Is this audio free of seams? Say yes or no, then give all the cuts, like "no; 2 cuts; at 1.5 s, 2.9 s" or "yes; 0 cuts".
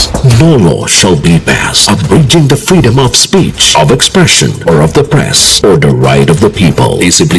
yes; 0 cuts